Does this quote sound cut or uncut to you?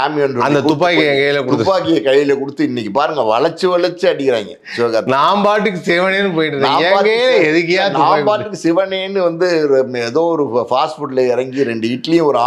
uncut